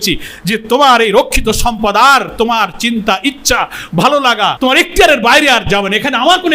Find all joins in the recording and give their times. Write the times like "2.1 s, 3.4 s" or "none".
4.5 s